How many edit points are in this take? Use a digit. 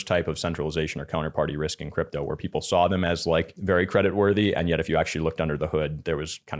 1